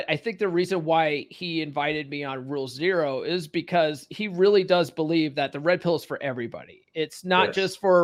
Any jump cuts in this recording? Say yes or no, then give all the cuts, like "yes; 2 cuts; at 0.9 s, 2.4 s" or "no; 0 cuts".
no; 0 cuts